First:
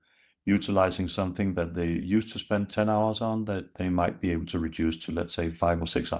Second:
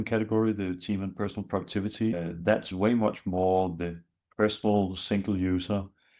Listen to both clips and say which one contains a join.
second; 1 cut; at 2.2 s

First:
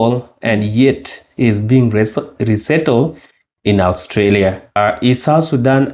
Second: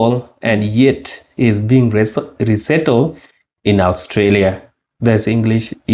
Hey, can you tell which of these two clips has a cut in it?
first; 1 cut; at 4.8 s

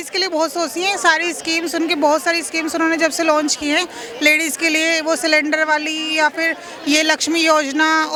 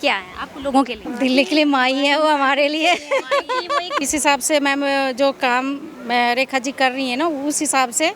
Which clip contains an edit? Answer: second; 2 cuts; at 1.0 s, 4.0 s

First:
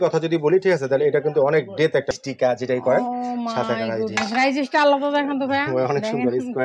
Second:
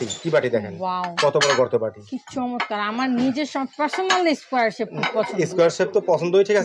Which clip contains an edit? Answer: first; 1 cut; at 2.1 s

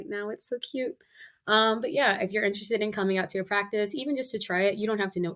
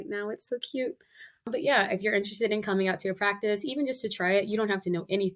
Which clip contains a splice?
second; 1 cut; at 1.5 s

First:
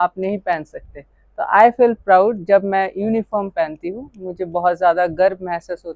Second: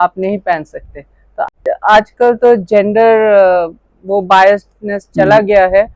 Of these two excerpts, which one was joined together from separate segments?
second; 1 cut; at 1.4 s

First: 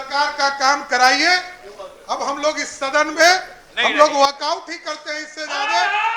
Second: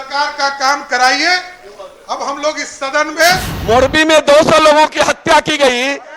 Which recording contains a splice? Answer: second; 1 cut; at 3.5 s

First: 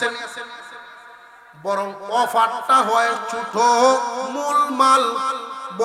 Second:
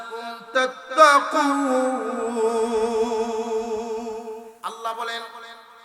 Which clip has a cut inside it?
second; 1 cut; at 4.4 s

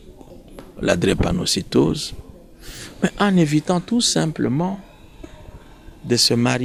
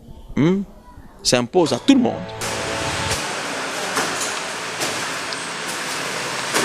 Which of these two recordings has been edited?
second; 1 cut; at 2.4 s

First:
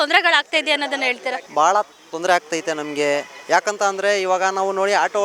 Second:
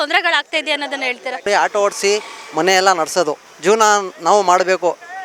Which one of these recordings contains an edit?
second; 2 cuts; at 1.5 s, 3.5 s

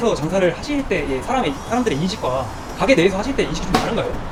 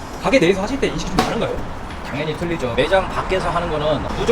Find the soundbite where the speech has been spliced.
second; 1 cut; at 2.7 s

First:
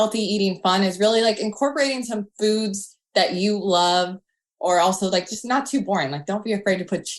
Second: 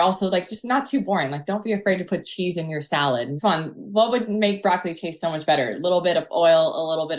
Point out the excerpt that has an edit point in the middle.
second; 1 cut; at 3.3 s

